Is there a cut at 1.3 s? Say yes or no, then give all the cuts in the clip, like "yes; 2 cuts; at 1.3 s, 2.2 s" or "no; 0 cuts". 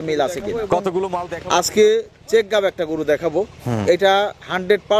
yes; 1 cut; at 1.3 s